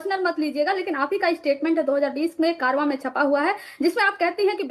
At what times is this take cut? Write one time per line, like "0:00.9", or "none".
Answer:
none